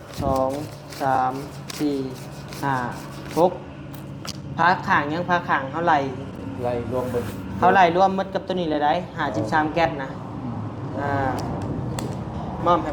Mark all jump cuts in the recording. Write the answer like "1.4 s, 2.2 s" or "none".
none